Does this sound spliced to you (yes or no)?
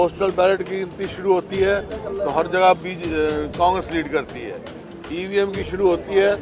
no